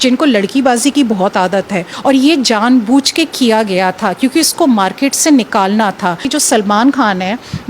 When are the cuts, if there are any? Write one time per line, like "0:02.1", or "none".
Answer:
0:01.9
0:06.3